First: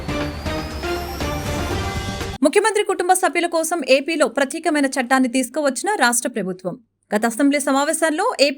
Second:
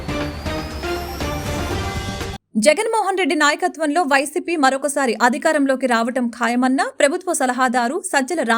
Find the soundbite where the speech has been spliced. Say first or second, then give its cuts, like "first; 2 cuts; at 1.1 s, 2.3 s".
second; 1 cut; at 2.3 s